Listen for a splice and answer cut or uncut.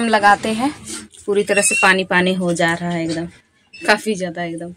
uncut